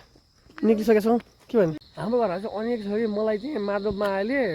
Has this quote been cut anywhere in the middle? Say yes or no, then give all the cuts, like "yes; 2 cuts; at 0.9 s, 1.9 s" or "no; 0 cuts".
yes; 1 cut; at 1.9 s